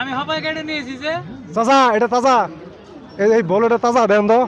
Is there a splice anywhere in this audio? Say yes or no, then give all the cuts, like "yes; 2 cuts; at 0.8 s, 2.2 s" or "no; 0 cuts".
no; 0 cuts